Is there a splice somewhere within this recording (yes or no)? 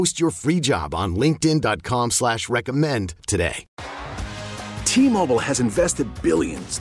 yes